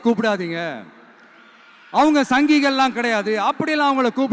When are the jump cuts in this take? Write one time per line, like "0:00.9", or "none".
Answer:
none